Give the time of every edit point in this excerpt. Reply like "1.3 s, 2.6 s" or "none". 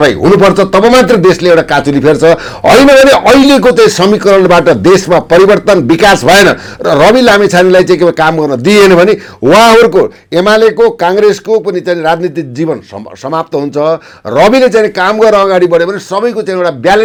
none